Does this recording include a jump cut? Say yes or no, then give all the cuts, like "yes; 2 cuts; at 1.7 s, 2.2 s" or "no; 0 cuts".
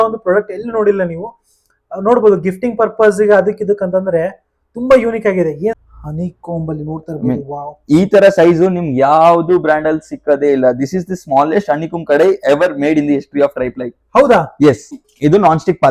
yes; 2 cuts; at 5.9 s, 15.0 s